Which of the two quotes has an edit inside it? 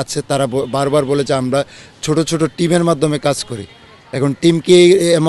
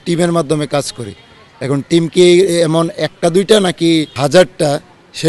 second; 1 cut; at 4.1 s

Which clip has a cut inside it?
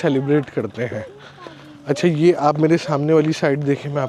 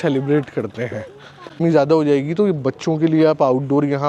second; 1 cut; at 1.6 s

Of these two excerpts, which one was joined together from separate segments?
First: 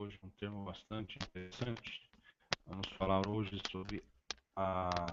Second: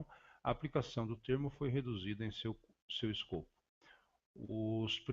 second; 1 cut; at 1.6 s

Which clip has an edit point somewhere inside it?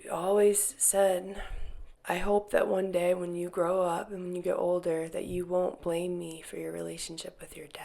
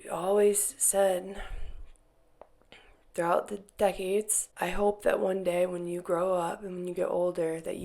first; 1 cut; at 1.9 s

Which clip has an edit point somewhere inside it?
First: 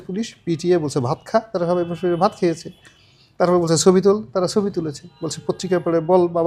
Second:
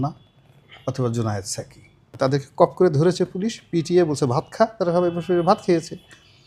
second; 1 cut; at 2.0 s

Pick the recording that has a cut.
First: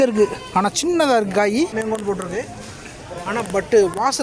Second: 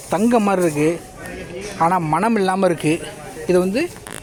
first; 1 cut; at 1.7 s

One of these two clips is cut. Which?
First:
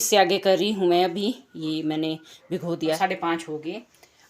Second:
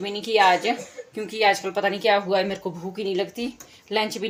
first; 1 cut; at 3.0 s

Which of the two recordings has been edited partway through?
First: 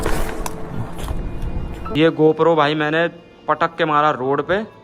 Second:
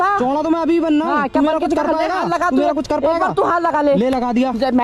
first; 1 cut; at 2.0 s

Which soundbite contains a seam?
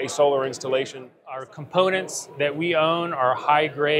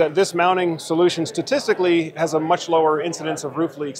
first; 1 cut; at 1.4 s

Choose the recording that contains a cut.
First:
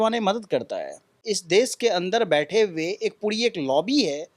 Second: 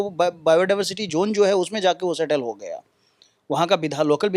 first; 1 cut; at 1.2 s

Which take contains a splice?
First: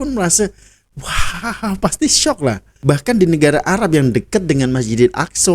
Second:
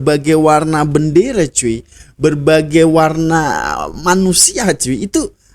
first; 1 cut; at 2.7 s

